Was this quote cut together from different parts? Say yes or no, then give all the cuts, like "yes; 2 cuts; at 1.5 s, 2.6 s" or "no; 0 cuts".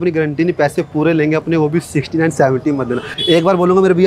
yes; 1 cut; at 3.1 s